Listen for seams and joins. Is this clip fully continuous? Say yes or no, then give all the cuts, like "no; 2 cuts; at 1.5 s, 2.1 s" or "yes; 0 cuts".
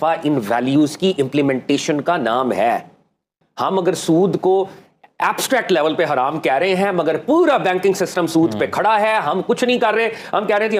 yes; 0 cuts